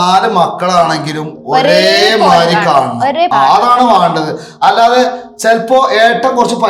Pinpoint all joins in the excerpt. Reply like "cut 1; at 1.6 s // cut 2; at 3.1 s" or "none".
cut 1; at 3.3 s